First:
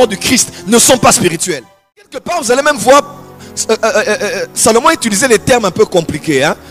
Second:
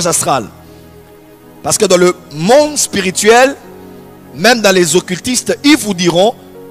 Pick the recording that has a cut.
first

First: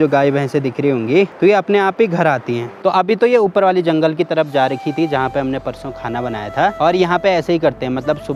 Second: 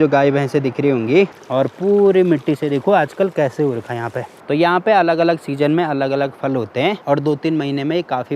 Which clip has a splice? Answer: second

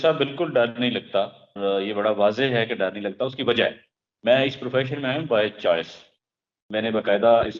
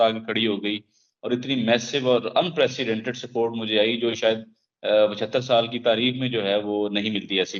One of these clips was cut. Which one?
first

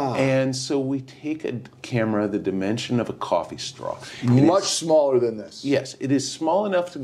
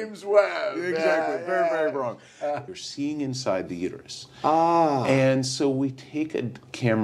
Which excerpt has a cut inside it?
second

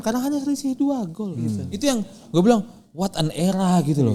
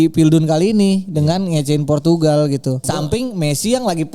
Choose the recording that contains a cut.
second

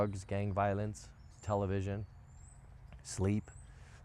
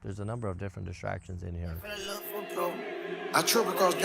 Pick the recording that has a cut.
second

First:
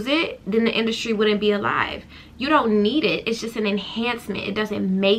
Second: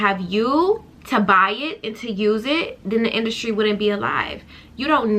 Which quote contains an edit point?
second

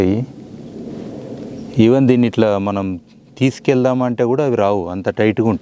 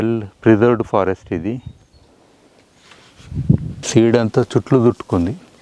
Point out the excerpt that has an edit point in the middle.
second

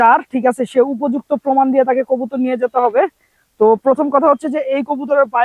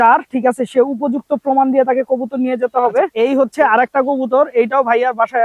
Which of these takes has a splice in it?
second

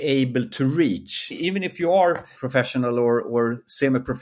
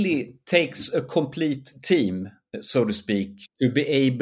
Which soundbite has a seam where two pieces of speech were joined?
first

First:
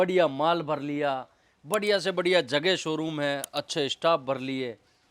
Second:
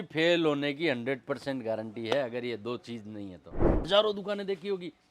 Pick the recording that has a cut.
second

